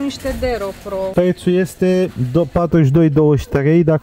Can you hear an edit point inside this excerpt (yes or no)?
yes